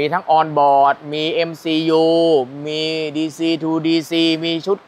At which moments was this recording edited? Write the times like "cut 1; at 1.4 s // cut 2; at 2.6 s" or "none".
none